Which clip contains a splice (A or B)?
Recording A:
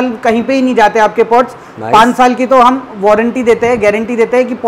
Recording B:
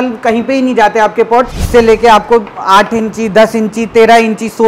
B